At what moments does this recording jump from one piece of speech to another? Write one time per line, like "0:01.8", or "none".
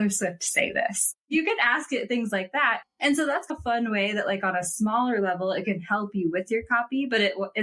0:01.2